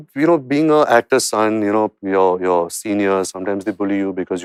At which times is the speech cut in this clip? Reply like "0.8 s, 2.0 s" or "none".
none